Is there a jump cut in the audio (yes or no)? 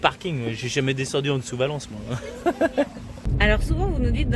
yes